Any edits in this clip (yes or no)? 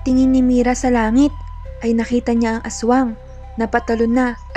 no